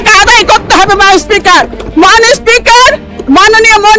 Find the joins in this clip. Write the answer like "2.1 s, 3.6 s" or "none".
none

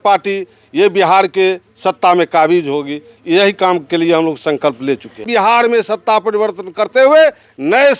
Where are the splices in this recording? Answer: 5.3 s

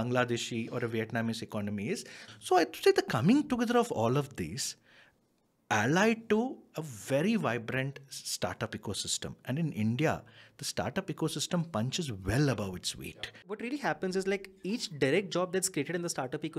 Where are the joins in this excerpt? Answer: 2.2 s, 13.6 s

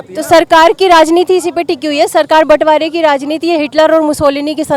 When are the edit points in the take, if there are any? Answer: none

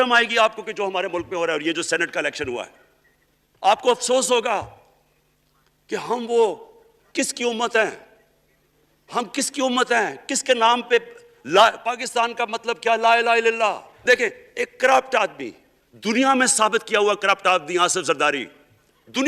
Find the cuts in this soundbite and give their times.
13.9 s

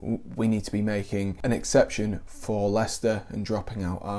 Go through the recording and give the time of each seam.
1.3 s

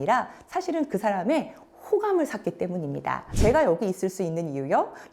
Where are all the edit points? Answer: 3.2 s

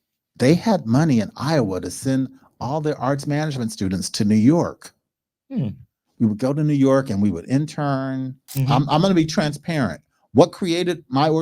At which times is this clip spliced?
8.4 s

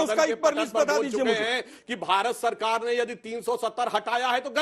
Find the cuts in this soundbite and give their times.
none

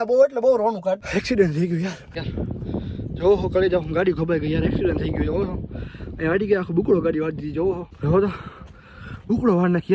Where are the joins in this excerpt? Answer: 1.0 s, 2.2 s, 7.9 s

